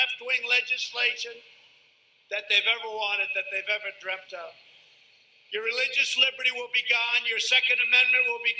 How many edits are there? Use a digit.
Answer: 2